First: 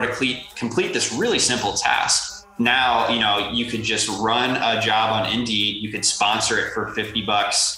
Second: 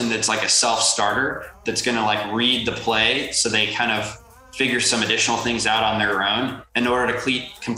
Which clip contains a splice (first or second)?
first